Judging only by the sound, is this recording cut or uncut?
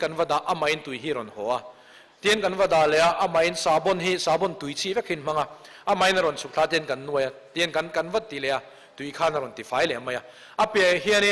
cut